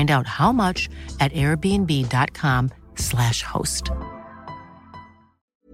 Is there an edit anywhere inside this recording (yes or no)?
no